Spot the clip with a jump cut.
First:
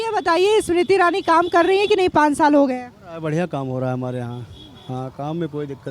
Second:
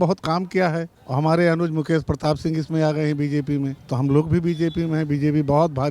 second; 2 cuts; at 1.0 s, 3.8 s

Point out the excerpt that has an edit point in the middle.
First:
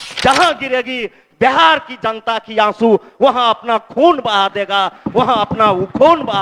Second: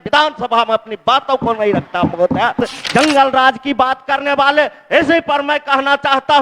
second; 1 cut; at 2.7 s

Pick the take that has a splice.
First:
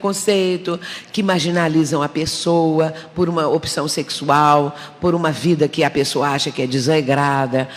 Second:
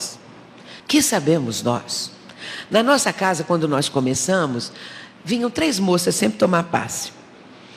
first; 1 cut; at 5.2 s

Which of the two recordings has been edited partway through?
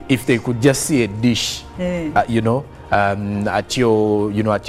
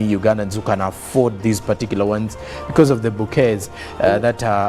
second; 1 cut; at 1.0 s

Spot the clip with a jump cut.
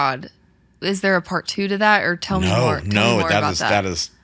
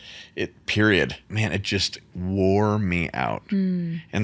second; 1 cut; at 1.3 s

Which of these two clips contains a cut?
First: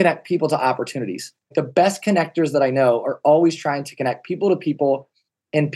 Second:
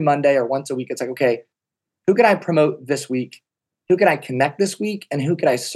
first; 1 cut; at 1.4 s

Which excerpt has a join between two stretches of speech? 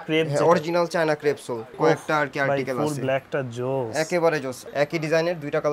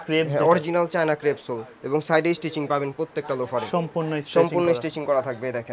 first; 2 cuts; at 1.7 s, 4.6 s

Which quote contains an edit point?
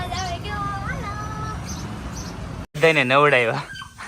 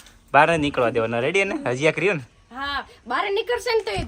first; 1 cut; at 2.6 s

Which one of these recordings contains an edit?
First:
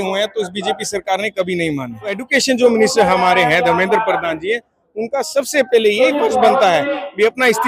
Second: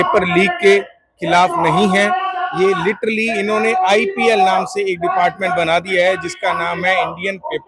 first; 1 cut; at 2.2 s

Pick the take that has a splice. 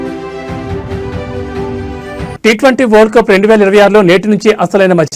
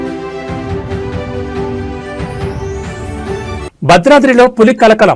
first; 1 cut; at 2.3 s

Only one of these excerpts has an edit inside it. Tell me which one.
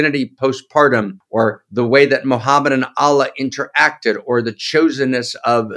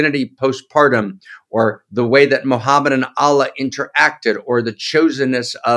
first; 1 cut; at 1.2 s

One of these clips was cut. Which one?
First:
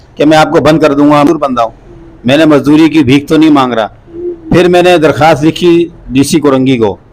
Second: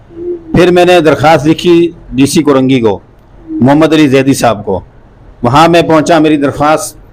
first; 1 cut; at 1.3 s

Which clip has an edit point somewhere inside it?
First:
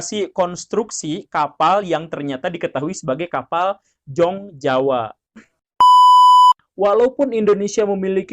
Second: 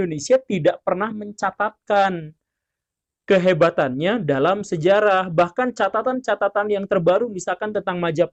first; 2 cuts; at 5.6 s, 6.6 s

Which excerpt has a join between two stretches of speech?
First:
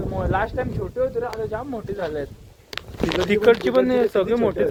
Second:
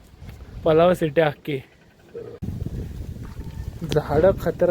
second; 1 cut; at 2.4 s

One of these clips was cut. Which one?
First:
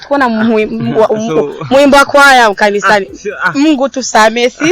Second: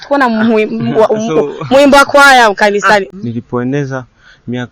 second; 1 cut; at 3.2 s

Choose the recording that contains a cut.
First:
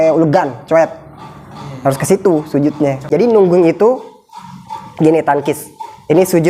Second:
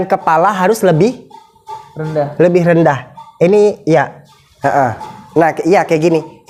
first; 1 cut; at 3.1 s

